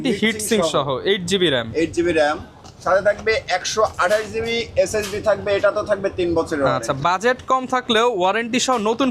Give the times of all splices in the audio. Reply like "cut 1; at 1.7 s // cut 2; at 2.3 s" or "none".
none